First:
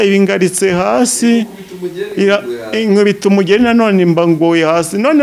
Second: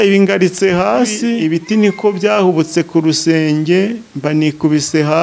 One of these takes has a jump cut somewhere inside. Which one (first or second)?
second